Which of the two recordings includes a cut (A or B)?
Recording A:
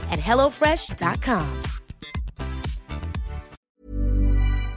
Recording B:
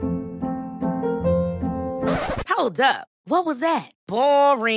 A